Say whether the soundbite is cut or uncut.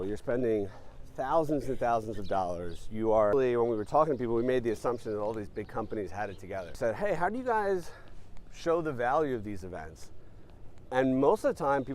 cut